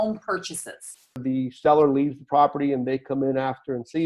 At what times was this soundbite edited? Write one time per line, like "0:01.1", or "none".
0:01.2